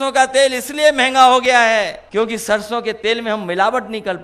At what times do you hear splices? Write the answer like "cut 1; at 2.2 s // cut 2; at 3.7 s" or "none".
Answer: cut 1; at 2.0 s